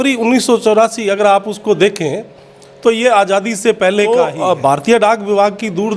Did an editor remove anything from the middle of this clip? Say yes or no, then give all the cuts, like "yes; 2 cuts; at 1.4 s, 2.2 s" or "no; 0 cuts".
yes; 1 cut; at 4.1 s